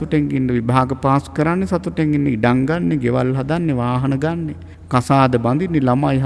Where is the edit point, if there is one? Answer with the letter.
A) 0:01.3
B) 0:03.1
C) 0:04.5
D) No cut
D